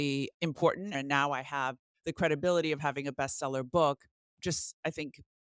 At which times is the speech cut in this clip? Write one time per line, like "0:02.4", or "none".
0:00.9